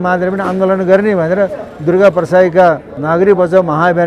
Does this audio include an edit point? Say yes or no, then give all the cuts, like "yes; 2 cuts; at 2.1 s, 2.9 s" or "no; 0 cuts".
yes; 1 cut; at 2.9 s